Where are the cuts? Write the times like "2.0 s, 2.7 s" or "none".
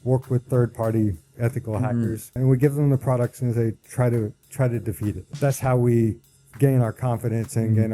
2.4 s, 5.2 s